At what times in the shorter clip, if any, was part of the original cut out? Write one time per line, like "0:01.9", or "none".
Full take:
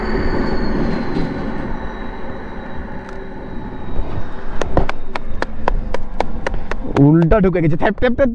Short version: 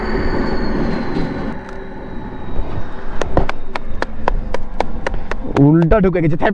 0:01.5